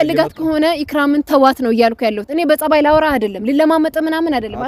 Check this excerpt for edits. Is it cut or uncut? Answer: uncut